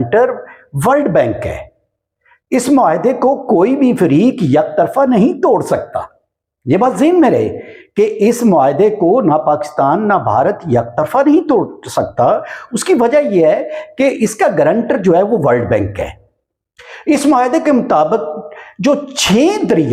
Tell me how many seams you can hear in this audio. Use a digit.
0